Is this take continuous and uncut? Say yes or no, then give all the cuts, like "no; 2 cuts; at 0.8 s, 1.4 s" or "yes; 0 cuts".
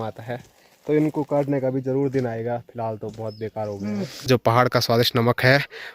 no; 1 cut; at 4.2 s